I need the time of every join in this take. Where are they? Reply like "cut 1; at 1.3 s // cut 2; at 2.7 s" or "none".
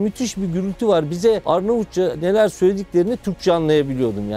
cut 1; at 1.4 s

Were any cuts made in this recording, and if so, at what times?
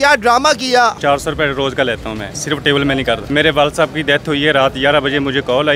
cut 1; at 1.0 s // cut 2; at 2.3 s // cut 3; at 3.2 s

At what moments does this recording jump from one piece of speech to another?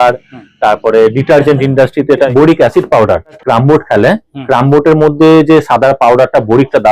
cut 1; at 2.3 s // cut 2; at 3.4 s

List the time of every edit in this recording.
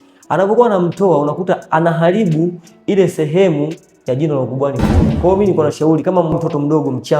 cut 1; at 5.0 s // cut 2; at 6.3 s

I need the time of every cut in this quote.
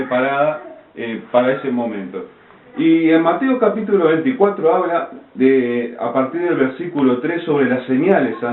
cut 1; at 2.8 s

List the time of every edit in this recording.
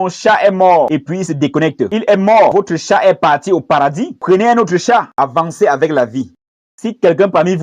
cut 1; at 5.1 s // cut 2; at 6.3 s

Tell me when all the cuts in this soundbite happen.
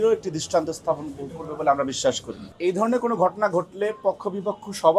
cut 1; at 2.2 s

